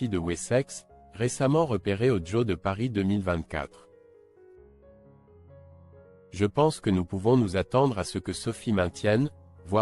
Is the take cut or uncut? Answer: cut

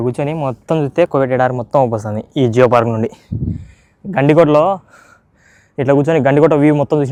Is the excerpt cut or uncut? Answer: uncut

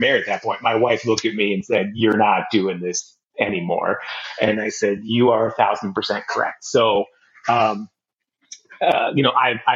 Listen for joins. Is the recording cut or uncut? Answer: uncut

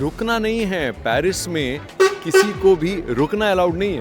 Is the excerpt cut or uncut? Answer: uncut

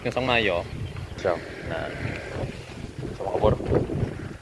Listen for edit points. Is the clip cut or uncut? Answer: cut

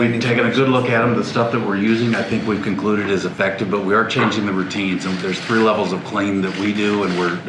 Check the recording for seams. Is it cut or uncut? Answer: uncut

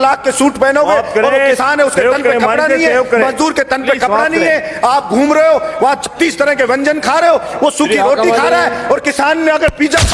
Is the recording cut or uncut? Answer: uncut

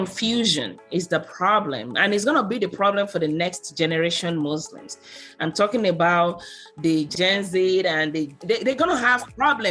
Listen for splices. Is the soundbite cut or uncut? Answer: cut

